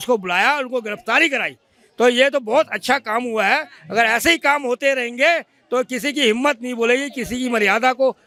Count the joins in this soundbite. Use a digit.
0